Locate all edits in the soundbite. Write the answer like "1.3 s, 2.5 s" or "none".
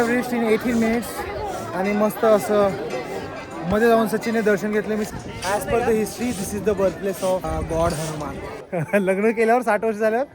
5.1 s, 7.4 s, 8.6 s